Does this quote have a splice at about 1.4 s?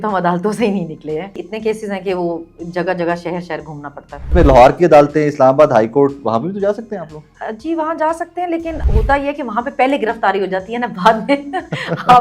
yes; 3 cuts; at 1.4 s, 4.3 s, 8.8 s

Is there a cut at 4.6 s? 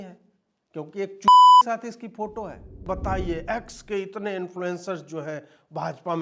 no; 1 cut; at 2.8 s

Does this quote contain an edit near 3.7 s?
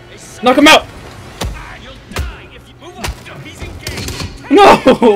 no; 0 cuts

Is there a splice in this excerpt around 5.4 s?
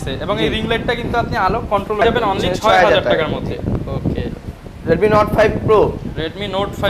no; 1 cut; at 2.0 s

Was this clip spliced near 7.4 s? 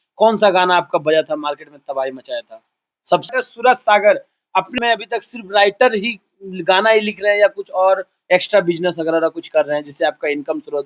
no; 2 cuts; at 3.3 s, 4.7 s

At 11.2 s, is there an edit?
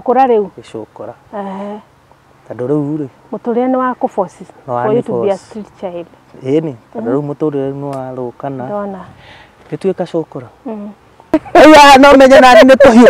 yes; 1 cut; at 11.2 s

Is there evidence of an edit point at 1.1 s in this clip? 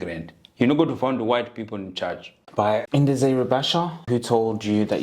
no; 2 cuts; at 2.7 s, 4.0 s

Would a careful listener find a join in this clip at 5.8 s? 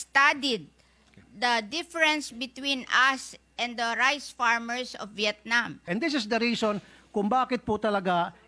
yes; 1 cut; at 5.8 s

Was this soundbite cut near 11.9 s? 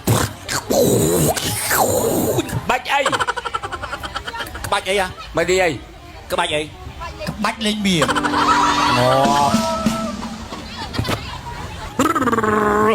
yes; 1 cut; at 11.9 s

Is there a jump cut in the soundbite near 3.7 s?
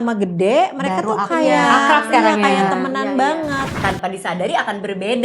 yes; 1 cut; at 3.7 s

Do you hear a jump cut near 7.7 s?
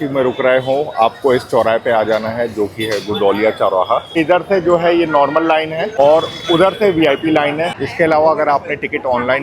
yes; 2 cuts; at 4.2 s, 7.7 s

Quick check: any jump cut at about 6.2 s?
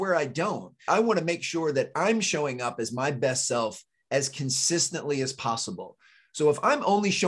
no; 1 cut; at 1.0 s

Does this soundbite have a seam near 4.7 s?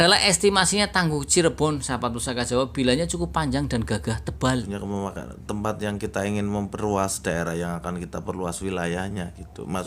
yes; 1 cut; at 4.7 s

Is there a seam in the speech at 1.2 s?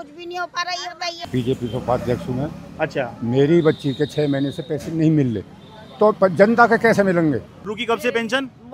yes; 2 cuts; at 1.2 s, 7.5 s

